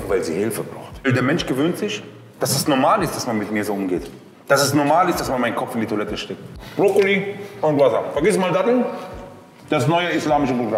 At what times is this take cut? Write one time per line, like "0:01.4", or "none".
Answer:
0:01.0
0:06.5